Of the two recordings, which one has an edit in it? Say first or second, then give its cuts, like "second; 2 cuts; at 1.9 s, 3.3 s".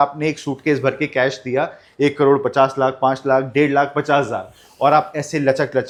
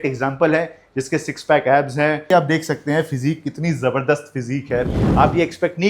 second; 2 cuts; at 2.2 s, 5.0 s